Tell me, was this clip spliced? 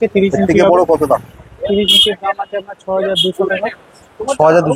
no; 0 cuts

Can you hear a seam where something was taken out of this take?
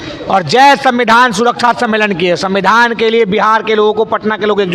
no; 0 cuts

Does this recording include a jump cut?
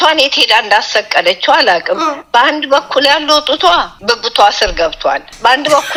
no; 0 cuts

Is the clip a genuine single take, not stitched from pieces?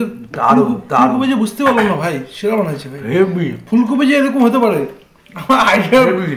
yes; 0 cuts

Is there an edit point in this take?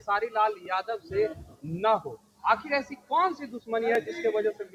no; 0 cuts

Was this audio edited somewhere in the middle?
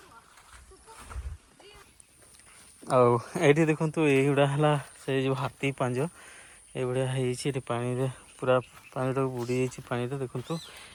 no; 0 cuts

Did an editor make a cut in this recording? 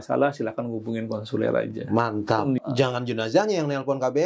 yes; 1 cut; at 2.6 s

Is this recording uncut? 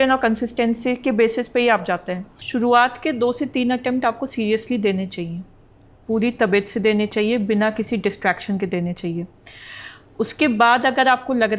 no; 1 cut; at 2.3 s

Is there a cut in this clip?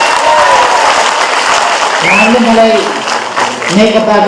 no; 0 cuts

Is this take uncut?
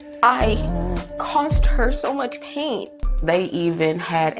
no; 1 cut; at 3.0 s

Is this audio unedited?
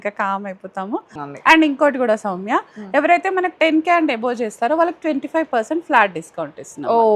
no; 1 cut; at 1.2 s

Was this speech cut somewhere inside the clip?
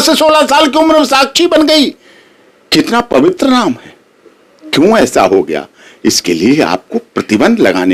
no; 0 cuts

